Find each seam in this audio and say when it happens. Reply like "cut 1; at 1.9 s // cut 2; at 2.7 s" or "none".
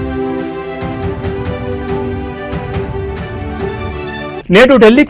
none